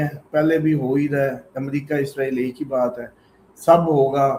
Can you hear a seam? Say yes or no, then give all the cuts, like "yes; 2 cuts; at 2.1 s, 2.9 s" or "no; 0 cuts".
no; 0 cuts